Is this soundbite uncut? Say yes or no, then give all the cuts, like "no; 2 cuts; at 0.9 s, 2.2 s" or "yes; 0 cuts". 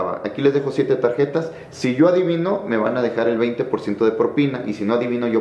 yes; 0 cuts